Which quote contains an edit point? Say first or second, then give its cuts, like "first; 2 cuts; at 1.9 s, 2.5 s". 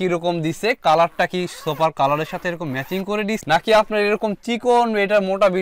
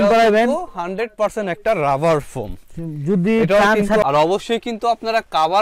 second; 1 cut; at 4.0 s